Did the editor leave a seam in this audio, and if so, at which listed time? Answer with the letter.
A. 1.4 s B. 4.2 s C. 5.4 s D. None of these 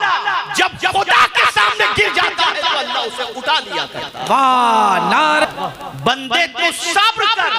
C